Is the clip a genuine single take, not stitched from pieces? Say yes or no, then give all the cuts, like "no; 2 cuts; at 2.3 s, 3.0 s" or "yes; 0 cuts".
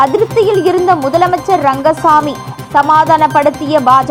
yes; 0 cuts